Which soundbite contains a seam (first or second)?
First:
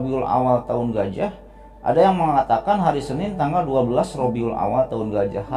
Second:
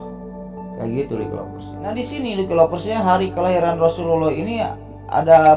second